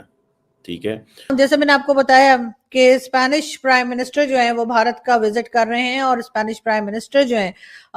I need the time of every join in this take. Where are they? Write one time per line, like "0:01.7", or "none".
0:01.3